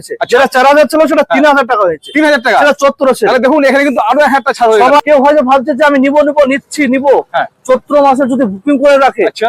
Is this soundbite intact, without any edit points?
no; 1 cut; at 5.0 s

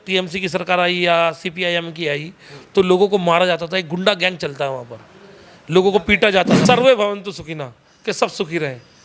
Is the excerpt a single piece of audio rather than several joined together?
no; 1 cut; at 6.6 s

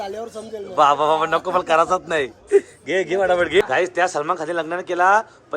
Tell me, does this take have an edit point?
yes; 1 cut; at 3.6 s

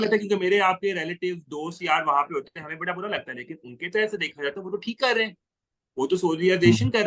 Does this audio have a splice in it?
no; 0 cuts

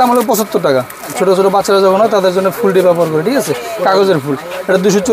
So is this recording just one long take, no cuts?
no; 1 cut; at 1.1 s

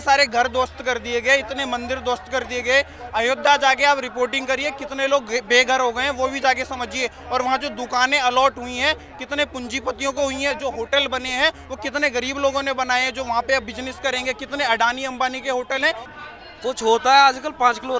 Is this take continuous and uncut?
no; 1 cut; at 16.1 s

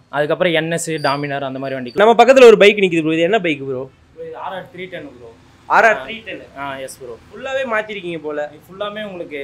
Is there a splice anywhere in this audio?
yes; 1 cut; at 2.0 s

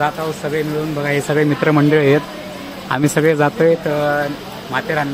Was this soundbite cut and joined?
no; 0 cuts

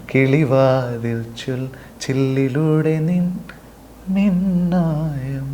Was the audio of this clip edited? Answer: no; 0 cuts

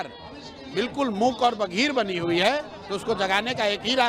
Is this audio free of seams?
yes; 0 cuts

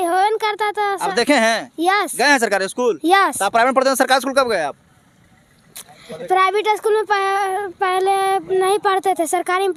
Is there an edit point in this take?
no; 0 cuts

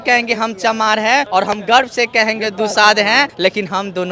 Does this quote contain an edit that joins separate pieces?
yes; 2 cuts; at 1.3 s, 3.3 s

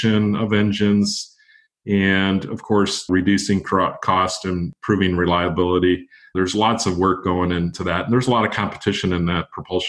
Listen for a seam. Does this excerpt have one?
yes; 4 cuts; at 3.1 s, 4.7 s, 6.2 s, 7.8 s

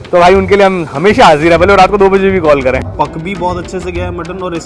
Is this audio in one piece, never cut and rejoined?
no; 1 cut; at 2.9 s

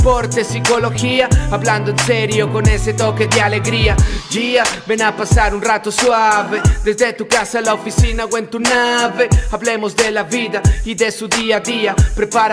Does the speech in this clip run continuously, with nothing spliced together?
yes; 0 cuts

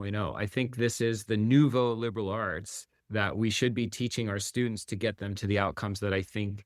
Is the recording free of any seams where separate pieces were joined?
no; 2 cuts; at 1.2 s, 5.4 s

